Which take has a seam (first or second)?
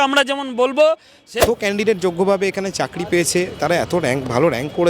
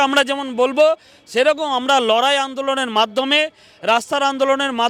first